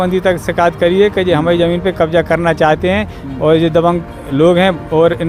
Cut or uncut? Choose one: uncut